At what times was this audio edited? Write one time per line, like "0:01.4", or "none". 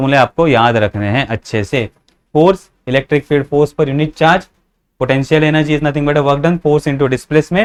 none